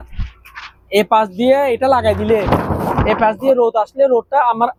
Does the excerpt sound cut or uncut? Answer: uncut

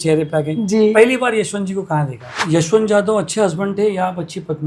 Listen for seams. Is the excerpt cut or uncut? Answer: cut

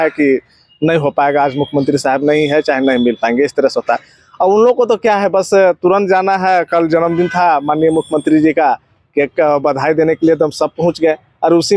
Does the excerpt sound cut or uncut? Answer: uncut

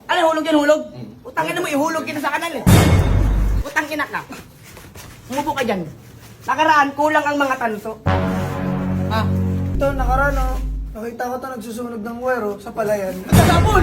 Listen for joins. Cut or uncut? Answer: cut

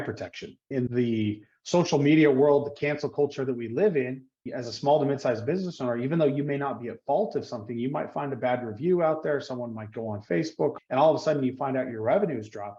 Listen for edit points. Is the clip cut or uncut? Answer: cut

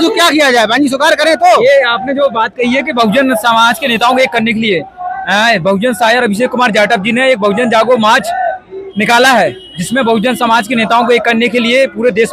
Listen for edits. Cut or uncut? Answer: uncut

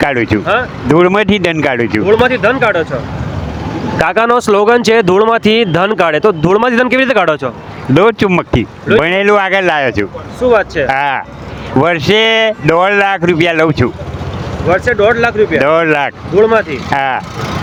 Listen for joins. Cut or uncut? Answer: uncut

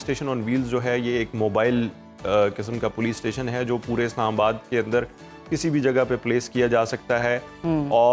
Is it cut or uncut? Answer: uncut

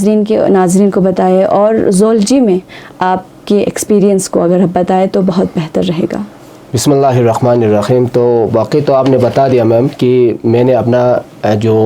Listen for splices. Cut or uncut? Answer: uncut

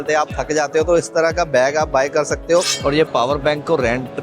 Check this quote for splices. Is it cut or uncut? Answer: uncut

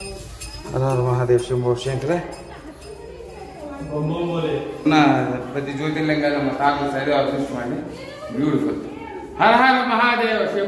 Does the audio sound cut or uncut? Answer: uncut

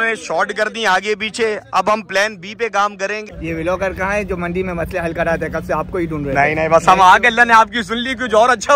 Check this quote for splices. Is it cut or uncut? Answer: cut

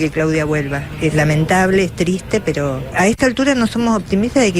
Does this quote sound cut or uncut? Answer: cut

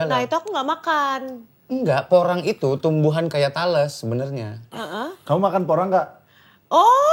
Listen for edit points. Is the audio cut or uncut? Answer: uncut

